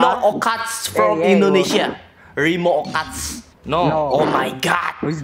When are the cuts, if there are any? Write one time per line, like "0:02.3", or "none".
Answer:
none